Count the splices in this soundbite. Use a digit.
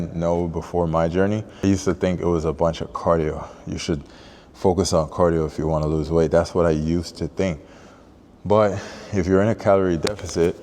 1